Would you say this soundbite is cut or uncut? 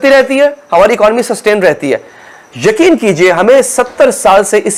uncut